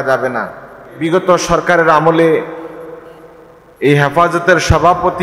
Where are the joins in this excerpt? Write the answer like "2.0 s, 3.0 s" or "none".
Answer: 1.0 s